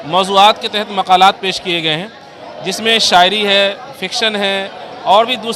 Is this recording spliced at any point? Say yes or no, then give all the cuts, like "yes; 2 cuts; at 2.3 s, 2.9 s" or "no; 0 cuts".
no; 0 cuts